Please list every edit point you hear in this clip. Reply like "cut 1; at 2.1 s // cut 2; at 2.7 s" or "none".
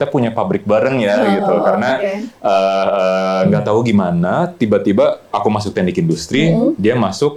none